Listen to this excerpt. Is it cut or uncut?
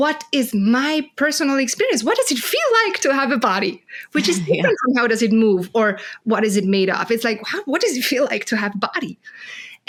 uncut